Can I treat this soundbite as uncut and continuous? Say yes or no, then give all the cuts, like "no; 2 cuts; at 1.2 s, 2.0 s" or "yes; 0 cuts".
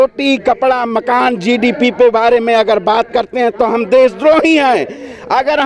yes; 0 cuts